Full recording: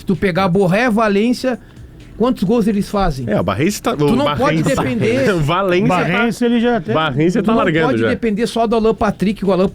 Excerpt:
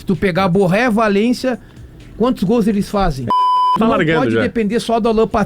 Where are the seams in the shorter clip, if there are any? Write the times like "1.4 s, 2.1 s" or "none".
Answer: 3.7 s